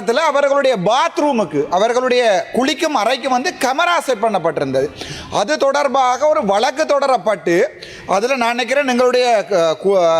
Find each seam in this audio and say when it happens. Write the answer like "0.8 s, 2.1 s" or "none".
none